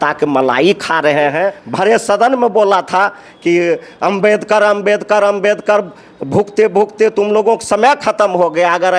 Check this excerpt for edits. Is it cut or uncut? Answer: cut